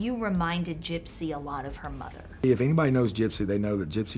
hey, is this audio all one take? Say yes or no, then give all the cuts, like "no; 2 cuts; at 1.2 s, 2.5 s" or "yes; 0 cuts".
no; 1 cut; at 2.4 s